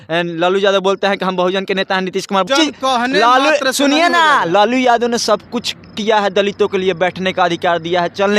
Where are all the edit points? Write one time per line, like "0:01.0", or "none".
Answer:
0:02.5